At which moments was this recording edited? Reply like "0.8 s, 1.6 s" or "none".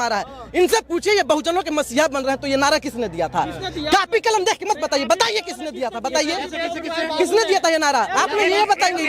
none